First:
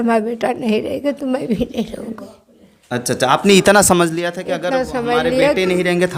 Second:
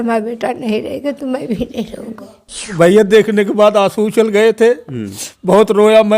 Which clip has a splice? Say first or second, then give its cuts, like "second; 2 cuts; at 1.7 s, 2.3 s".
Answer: second; 1 cut; at 2.7 s